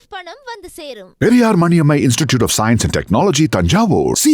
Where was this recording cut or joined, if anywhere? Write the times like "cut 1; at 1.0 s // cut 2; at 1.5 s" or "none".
none